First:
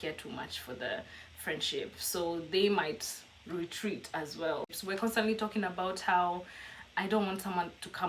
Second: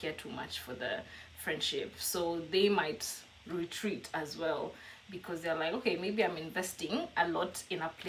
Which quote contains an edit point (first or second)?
first